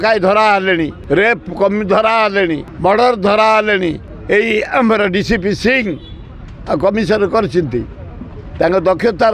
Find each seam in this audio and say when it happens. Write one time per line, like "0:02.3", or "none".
0:01.0
0:02.7
0:04.1